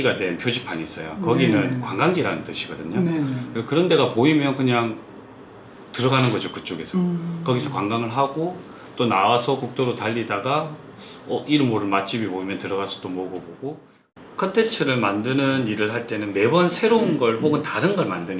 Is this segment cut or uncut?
cut